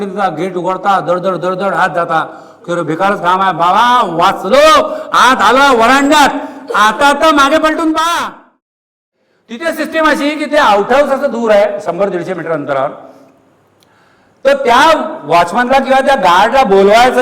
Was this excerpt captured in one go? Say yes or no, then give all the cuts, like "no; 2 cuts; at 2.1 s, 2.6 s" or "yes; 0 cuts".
no; 1 cut; at 9.0 s